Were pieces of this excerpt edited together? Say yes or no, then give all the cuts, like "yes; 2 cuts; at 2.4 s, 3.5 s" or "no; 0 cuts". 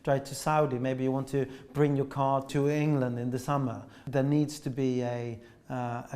yes; 2 cuts; at 2.5 s, 4.0 s